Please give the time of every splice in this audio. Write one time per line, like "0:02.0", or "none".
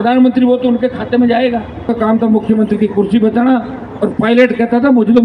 0:01.9